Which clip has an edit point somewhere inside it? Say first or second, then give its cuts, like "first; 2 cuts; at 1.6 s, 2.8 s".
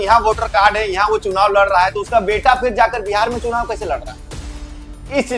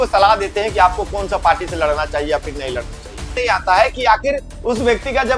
second; 1 cut; at 3.4 s